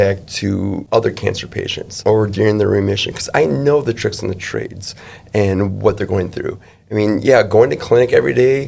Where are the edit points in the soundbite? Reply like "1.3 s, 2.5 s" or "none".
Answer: 0.8 s, 1.9 s